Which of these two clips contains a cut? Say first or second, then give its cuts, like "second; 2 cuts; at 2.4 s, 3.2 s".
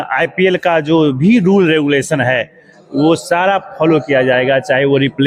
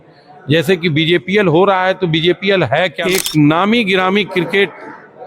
second; 1 cut; at 3.1 s